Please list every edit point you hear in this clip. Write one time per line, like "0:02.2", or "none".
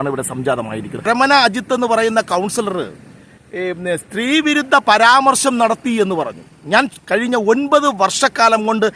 0:01.1